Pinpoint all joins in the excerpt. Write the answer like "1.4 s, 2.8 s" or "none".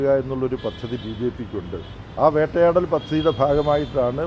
2.0 s

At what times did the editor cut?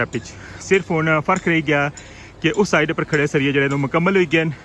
none

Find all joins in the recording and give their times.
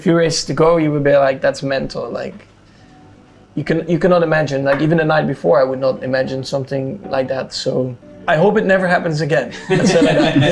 8.1 s

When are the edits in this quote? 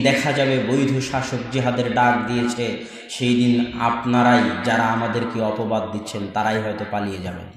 none

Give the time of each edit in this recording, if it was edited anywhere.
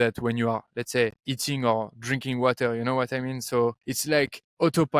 1.3 s, 3.9 s

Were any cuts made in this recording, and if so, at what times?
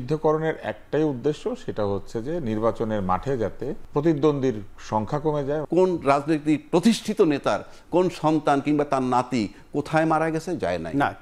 3.8 s, 5.6 s

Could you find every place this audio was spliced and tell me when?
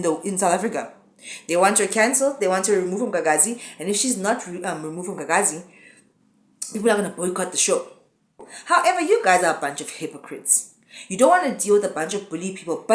8.4 s

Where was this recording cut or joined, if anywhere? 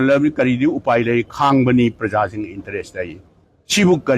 none

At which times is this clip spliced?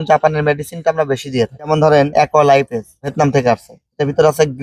1.9 s

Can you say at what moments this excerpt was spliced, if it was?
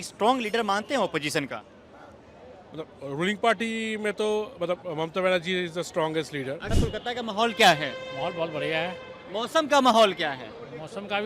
6.7 s

